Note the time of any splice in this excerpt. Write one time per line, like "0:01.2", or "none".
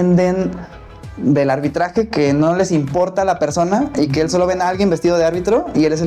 none